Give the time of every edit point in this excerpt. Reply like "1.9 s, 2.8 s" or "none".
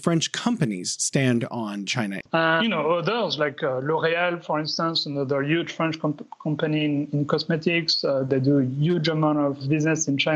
2.2 s